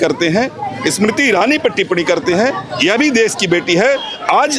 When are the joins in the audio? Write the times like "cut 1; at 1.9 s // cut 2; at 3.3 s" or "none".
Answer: none